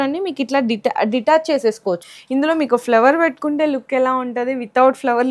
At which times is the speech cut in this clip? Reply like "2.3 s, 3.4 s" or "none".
2.1 s